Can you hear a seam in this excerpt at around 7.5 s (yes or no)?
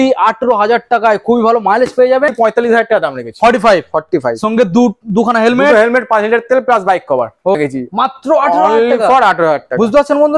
yes